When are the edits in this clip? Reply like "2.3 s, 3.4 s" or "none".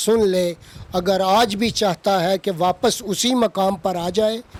none